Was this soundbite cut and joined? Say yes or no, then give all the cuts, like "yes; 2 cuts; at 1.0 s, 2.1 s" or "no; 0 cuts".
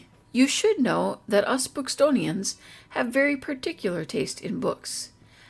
no; 0 cuts